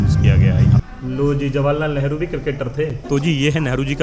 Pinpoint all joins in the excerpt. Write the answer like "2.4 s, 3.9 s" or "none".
0.8 s, 3.0 s